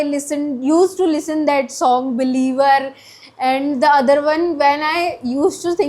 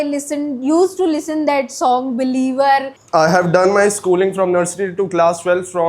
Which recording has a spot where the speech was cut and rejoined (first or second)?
second